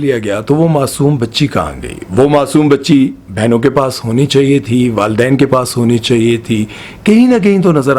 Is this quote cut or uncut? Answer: uncut